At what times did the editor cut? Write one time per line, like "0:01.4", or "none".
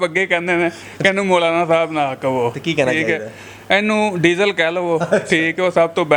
none